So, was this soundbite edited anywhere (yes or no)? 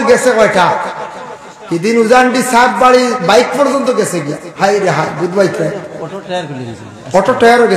no